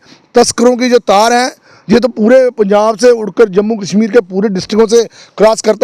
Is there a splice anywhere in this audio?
no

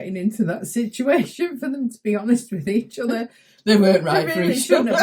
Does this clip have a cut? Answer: no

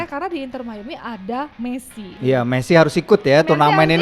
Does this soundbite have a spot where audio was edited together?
yes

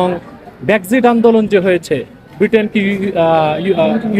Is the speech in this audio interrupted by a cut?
no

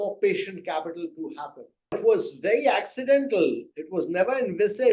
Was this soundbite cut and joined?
yes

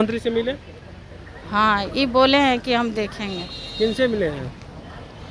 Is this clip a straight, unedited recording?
yes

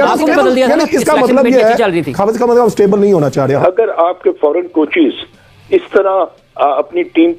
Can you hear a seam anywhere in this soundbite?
yes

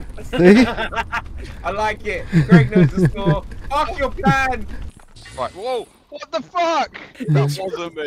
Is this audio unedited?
no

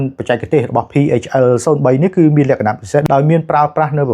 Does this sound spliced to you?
yes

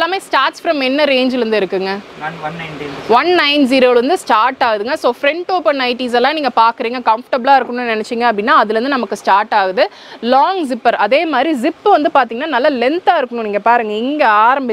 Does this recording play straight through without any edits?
yes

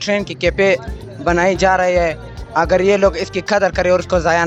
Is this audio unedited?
yes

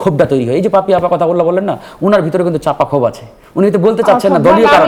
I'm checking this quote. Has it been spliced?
no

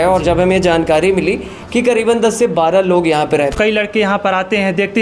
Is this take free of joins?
no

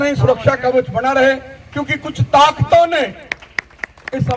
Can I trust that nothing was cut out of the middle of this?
yes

